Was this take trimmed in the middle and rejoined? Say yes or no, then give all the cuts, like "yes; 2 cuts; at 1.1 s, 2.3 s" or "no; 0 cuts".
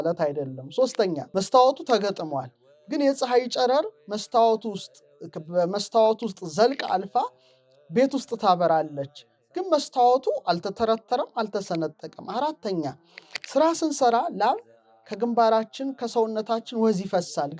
yes; 1 cut; at 1.2 s